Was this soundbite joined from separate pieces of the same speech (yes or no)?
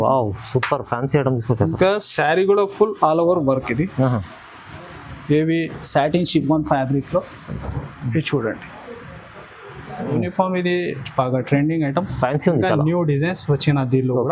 yes